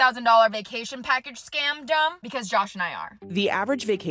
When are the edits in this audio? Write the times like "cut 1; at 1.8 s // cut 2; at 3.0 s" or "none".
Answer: cut 1; at 2.2 s // cut 2; at 3.2 s